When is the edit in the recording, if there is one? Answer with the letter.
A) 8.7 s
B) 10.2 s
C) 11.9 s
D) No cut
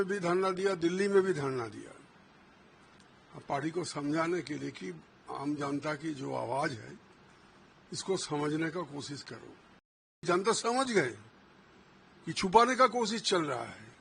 B